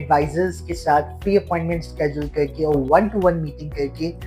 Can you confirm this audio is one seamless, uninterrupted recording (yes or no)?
yes